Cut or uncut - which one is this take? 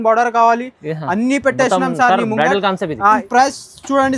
cut